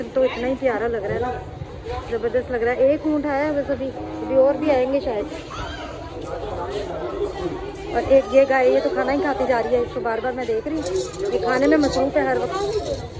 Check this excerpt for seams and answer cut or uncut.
uncut